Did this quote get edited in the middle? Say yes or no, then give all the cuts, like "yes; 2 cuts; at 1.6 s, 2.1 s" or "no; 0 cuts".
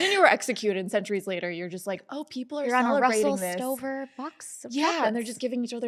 no; 0 cuts